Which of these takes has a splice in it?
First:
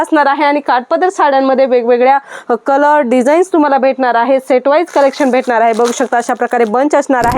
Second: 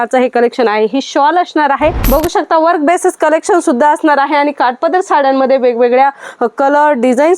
second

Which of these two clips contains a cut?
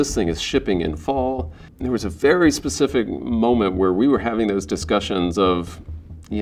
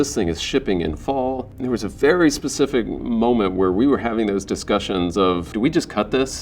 second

